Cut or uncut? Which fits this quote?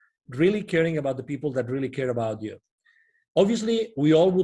uncut